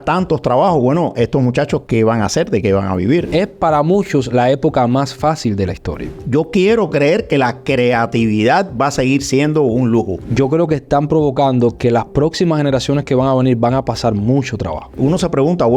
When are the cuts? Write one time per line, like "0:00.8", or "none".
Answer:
0:03.3
0:06.2
0:10.2
0:14.9